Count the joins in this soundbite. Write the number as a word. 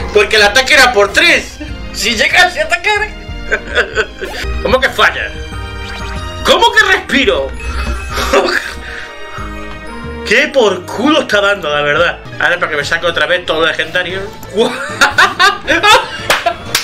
three